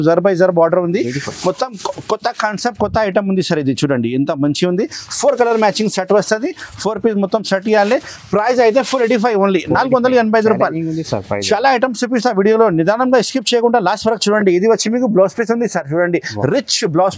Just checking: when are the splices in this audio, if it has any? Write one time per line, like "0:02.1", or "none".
none

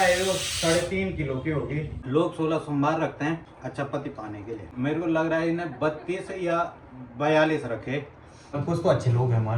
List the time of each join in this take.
0:01.9
0:03.5
0:04.7
0:08.6

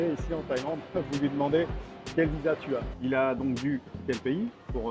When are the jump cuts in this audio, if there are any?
0:02.9
0:04.0

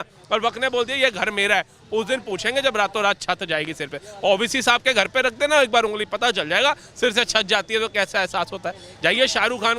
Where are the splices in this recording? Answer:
none

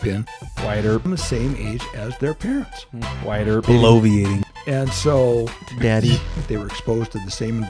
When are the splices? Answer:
0:06.4

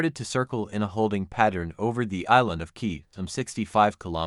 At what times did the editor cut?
none

